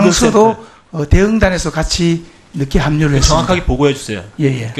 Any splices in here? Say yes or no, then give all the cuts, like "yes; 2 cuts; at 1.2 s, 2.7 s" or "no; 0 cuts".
yes; 1 cut; at 1.8 s